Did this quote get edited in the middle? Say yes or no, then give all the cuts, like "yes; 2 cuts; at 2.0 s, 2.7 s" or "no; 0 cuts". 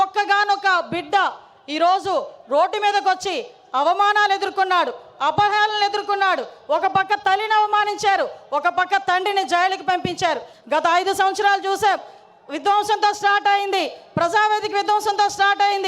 yes; 1 cut; at 10.5 s